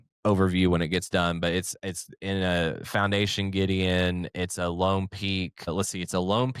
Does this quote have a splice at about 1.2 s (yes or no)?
no